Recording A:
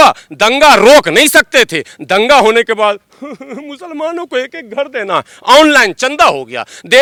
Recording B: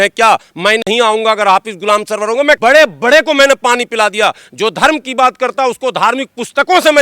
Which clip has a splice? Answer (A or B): B